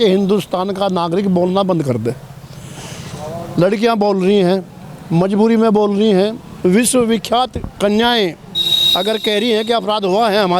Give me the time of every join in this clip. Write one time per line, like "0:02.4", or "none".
none